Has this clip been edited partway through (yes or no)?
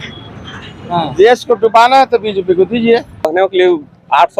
yes